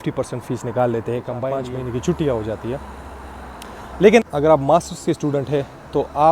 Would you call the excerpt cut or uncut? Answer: uncut